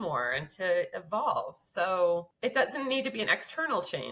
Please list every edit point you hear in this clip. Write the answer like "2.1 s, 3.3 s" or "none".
2.3 s